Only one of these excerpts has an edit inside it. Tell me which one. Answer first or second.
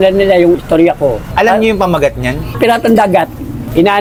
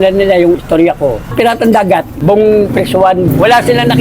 second